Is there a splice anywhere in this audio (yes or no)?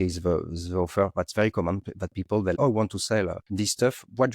yes